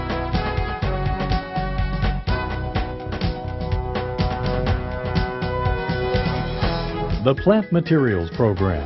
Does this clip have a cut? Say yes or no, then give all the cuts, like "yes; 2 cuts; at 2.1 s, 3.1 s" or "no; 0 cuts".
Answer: yes; 1 cut; at 2.9 s